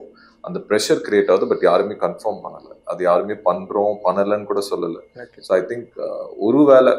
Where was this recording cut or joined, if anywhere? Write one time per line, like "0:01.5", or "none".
none